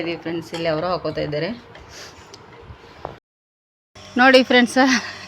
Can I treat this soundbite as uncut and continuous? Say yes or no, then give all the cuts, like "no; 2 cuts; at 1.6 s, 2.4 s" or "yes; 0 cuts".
no; 1 cut; at 3.2 s